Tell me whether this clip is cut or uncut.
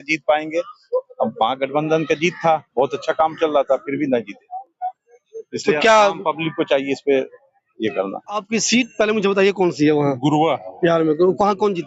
uncut